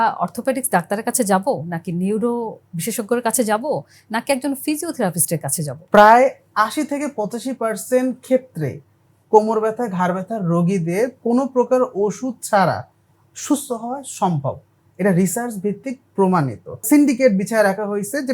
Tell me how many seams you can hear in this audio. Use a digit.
2